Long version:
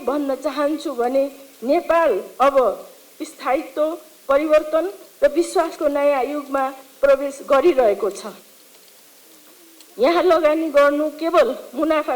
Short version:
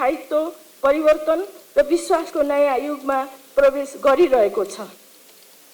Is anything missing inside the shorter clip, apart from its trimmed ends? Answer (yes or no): no